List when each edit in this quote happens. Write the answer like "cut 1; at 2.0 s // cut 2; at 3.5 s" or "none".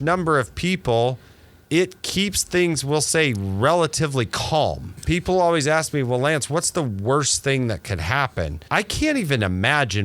cut 1; at 4.9 s // cut 2; at 8.6 s